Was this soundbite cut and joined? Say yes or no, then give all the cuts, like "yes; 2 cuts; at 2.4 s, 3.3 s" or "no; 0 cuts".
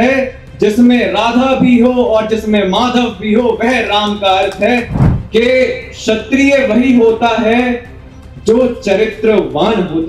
yes; 1 cut; at 5.0 s